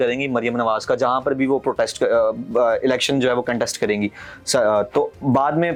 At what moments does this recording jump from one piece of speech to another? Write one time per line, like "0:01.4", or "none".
none